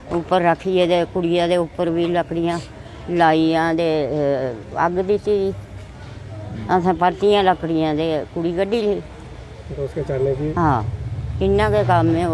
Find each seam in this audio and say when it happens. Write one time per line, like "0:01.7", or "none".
none